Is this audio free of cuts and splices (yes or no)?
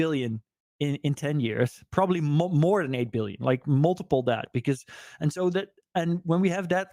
yes